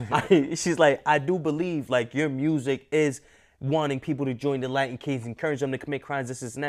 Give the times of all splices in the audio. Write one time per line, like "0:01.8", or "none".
none